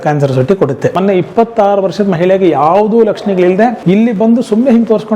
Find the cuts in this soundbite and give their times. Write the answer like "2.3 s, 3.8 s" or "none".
1.0 s, 3.8 s